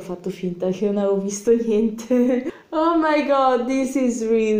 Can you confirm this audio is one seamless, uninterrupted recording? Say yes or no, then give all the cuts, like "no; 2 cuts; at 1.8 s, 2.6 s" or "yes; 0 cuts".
yes; 0 cuts